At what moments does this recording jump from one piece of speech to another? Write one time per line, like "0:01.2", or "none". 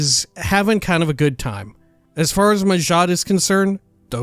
0:01.9